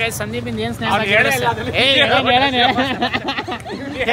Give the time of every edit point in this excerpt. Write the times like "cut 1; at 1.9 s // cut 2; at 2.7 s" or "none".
none